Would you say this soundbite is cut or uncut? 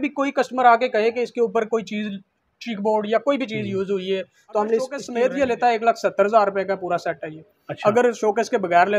cut